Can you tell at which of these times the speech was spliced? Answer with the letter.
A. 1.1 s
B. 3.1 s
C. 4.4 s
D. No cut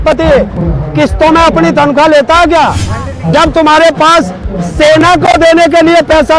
B